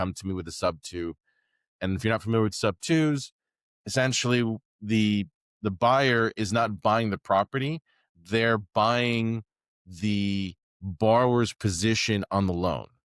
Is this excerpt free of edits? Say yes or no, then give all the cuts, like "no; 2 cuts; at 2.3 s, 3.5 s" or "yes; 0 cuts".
yes; 0 cuts